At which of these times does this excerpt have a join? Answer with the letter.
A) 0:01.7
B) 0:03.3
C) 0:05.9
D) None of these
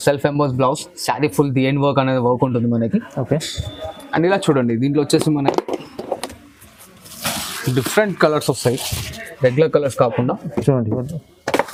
D